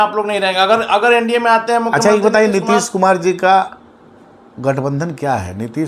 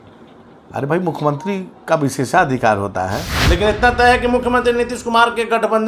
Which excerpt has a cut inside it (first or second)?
second